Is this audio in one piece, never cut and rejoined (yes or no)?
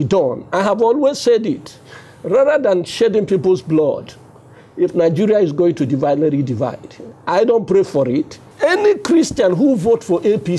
no